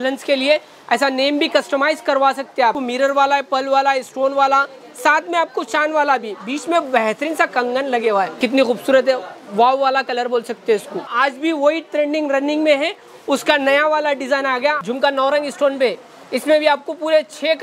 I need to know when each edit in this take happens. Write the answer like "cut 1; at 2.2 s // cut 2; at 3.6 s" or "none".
cut 1; at 2.8 s // cut 2; at 8.4 s // cut 3; at 11.0 s // cut 4; at 14.8 s